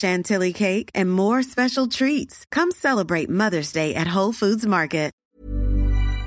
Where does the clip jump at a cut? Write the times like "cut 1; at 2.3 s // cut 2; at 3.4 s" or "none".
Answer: cut 1; at 5.1 s